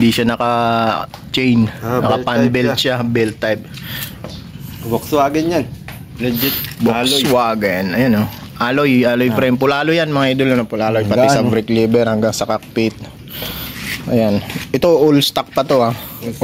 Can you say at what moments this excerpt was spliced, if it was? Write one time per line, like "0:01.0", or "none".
none